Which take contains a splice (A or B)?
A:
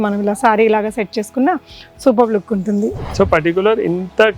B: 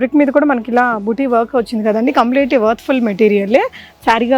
A